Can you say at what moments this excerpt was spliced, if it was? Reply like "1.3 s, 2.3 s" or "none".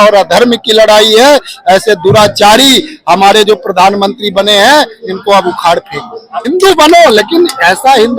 6.3 s